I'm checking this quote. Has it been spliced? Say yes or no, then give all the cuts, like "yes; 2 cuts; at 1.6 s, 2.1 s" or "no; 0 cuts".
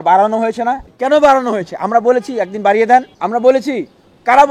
yes; 2 cuts; at 0.9 s, 3.2 s